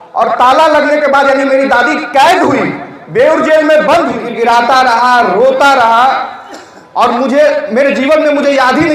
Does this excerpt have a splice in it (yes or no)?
yes